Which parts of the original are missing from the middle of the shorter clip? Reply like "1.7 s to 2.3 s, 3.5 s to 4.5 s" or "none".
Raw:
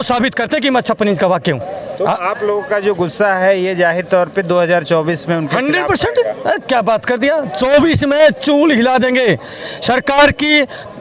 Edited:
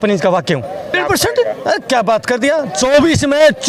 1.9 s to 5.8 s